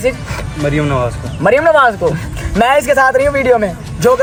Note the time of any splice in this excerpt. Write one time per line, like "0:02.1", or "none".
none

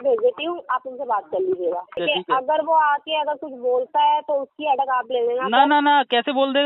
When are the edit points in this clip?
0:01.9

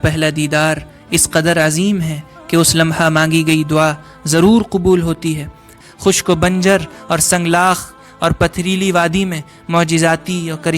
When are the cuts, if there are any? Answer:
0:05.7

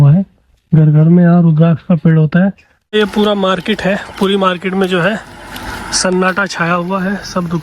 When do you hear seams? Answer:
0:02.9

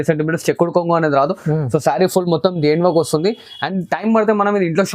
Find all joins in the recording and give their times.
none

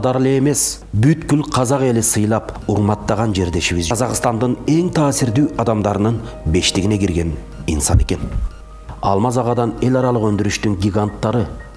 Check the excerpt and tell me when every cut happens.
0:03.9

